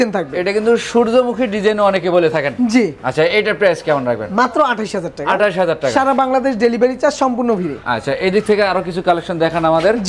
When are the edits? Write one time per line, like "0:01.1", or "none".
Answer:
none

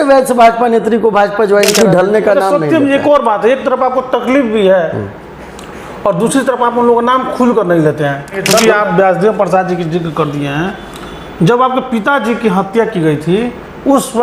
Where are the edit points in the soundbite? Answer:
0:01.7
0:08.5

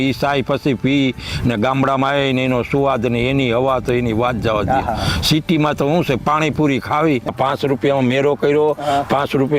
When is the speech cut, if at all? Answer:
0:07.3

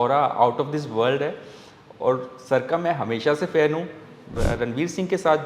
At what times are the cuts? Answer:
0:04.3

